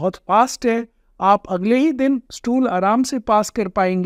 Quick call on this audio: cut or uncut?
uncut